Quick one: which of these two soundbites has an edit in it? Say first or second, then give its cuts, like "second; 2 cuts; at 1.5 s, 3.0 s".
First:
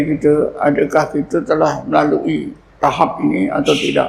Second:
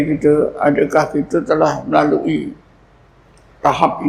first; 1 cut; at 2.6 s